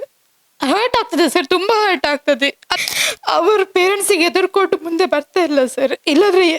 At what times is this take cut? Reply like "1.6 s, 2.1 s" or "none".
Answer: 2.7 s